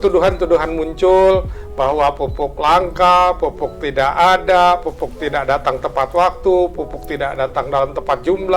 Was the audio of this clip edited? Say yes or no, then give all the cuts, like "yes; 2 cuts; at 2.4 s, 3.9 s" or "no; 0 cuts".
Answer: no; 0 cuts